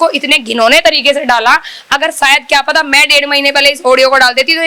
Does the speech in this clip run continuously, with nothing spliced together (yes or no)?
yes